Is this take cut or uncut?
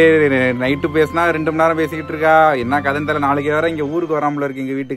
uncut